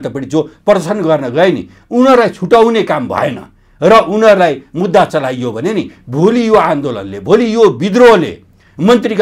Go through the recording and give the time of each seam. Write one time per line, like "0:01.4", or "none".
none